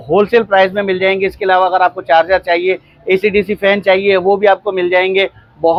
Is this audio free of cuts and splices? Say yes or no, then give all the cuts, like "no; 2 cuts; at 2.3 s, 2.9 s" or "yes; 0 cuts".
yes; 0 cuts